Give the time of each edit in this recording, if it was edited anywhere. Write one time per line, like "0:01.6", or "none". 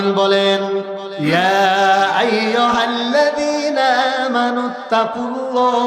0:01.1